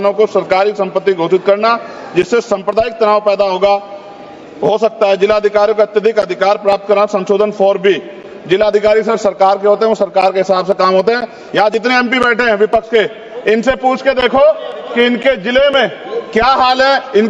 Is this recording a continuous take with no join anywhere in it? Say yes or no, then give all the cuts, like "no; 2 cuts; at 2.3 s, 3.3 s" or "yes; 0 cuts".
yes; 0 cuts